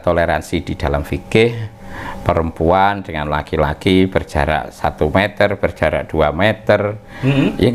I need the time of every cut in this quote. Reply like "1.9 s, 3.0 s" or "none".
none